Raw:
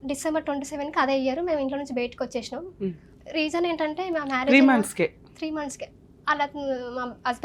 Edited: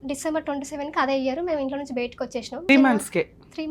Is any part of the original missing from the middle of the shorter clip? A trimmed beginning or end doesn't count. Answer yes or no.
yes